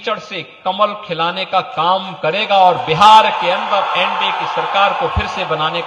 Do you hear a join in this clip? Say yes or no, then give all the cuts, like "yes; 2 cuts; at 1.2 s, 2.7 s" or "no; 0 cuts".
no; 0 cuts